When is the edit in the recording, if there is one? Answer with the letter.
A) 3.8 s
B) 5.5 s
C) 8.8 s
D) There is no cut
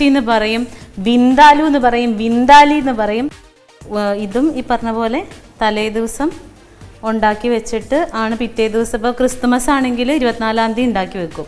A